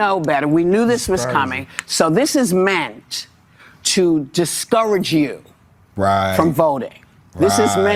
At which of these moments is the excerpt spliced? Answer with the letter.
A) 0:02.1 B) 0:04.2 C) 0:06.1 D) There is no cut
D